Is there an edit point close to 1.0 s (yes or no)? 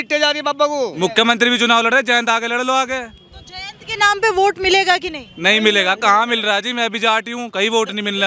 yes